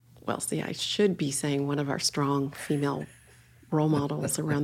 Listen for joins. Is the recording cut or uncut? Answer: uncut